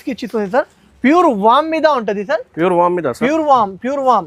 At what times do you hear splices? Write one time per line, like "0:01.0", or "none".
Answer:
none

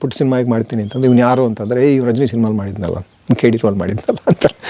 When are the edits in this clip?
none

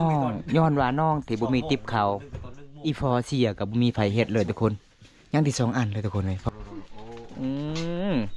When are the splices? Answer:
0:06.5

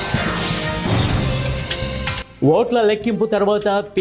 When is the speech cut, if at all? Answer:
0:02.3

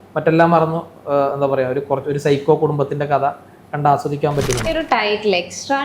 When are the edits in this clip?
0:04.7

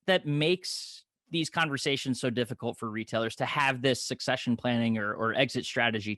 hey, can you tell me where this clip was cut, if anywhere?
none

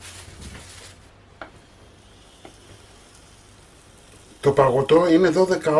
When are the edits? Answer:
0:01.2

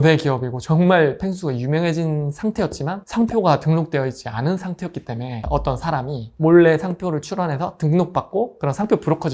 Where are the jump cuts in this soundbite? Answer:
none

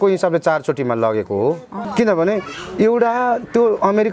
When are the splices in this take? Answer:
0:01.8

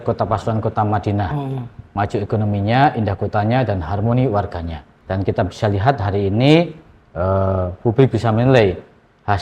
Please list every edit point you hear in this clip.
0:04.9

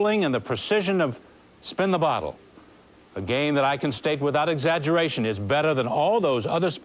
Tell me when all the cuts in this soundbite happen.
0:01.3

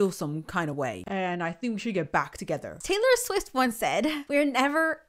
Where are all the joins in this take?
0:01.0
0:02.7
0:04.2

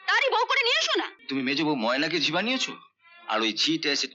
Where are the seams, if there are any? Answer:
0:01.2

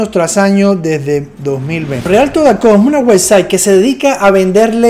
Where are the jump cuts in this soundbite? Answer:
0:02.1

